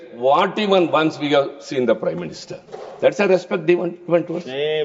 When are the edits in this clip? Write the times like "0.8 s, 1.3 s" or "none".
none